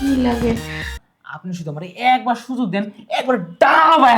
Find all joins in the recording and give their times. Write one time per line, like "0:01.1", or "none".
0:00.9